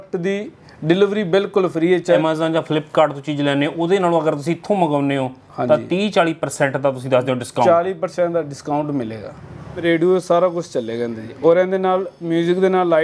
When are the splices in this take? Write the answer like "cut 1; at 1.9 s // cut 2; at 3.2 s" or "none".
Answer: cut 1; at 2.2 s // cut 2; at 9.8 s